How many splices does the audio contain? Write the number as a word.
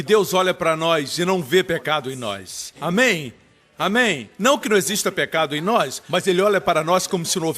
one